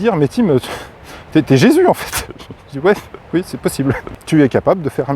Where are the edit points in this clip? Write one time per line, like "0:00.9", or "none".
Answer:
0:04.1